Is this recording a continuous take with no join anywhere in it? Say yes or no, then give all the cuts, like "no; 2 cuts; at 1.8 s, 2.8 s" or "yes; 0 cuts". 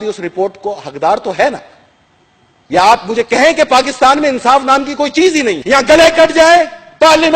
yes; 0 cuts